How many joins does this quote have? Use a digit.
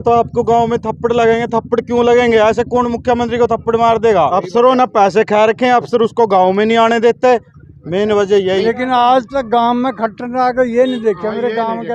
2